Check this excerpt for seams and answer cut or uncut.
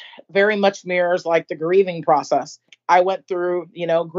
cut